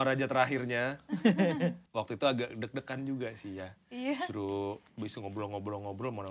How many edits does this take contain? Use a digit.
1